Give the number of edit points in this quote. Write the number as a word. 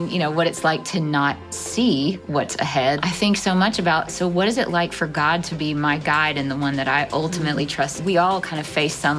two